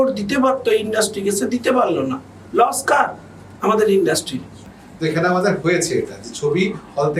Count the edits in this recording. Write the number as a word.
one